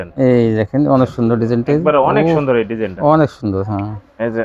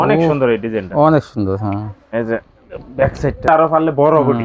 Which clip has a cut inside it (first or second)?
second